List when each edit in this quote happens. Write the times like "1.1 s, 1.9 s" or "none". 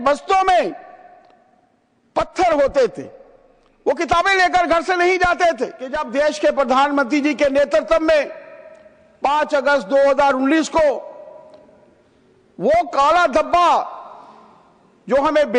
6.0 s